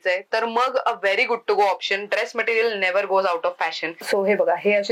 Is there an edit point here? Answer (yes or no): yes